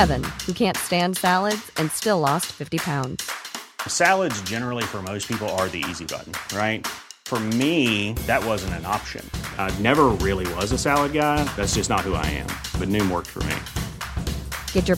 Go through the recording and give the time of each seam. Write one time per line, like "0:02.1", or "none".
none

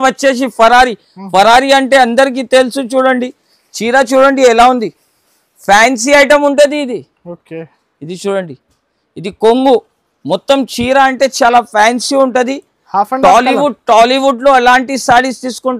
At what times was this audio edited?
none

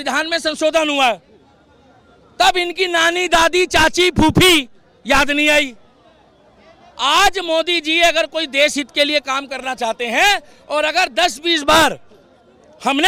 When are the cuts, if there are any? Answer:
none

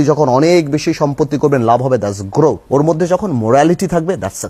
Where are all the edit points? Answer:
0:02.6

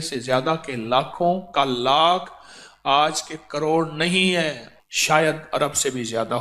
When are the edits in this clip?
0:04.7

